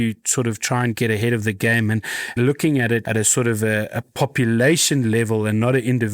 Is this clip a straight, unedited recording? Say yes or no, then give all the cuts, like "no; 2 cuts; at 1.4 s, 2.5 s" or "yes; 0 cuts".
no; 1 cut; at 2.2 s